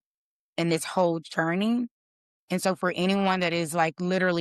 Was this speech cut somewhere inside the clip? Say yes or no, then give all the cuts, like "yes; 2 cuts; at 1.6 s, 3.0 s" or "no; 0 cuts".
no; 0 cuts